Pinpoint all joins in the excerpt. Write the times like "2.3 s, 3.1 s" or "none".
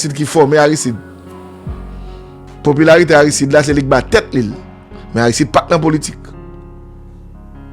1.0 s, 2.3 s